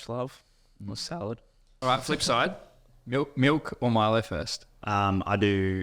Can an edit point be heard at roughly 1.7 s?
yes; 2 cuts; at 1.7 s, 4.8 s

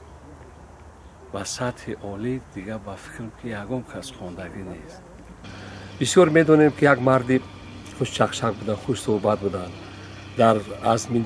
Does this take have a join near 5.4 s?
yes; 1 cut; at 5.4 s

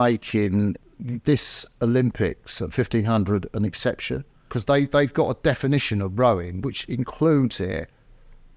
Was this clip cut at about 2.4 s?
no; 3 cuts; at 0.8 s, 4.5 s, 6.6 s

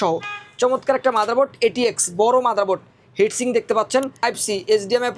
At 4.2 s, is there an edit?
yes; 1 cut; at 4.2 s

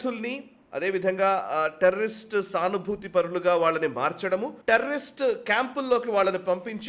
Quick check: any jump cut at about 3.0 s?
no; 1 cut; at 4.5 s

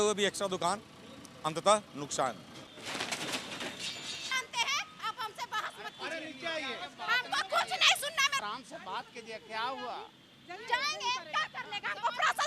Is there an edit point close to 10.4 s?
no; 2 cuts; at 4.3 s, 8.4 s

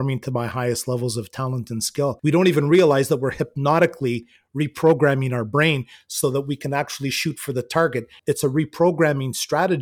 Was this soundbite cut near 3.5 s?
no; 2 cuts; at 2.2 s, 8.2 s

